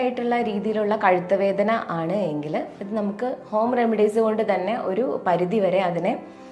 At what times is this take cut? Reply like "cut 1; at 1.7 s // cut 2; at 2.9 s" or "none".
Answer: none